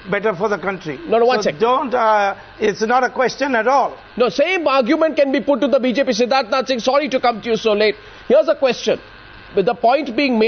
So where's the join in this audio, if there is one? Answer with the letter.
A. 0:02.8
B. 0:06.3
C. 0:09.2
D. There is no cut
B